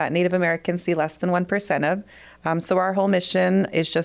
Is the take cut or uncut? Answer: uncut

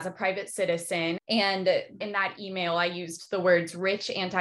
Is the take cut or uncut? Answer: cut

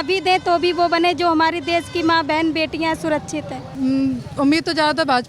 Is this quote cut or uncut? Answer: cut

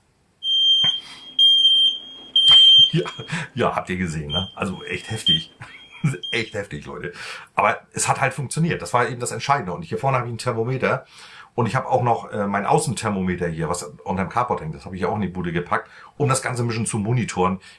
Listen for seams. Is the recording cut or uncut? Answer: uncut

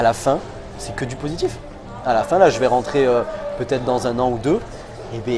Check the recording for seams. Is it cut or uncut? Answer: uncut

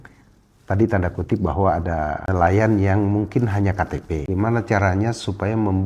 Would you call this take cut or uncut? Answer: cut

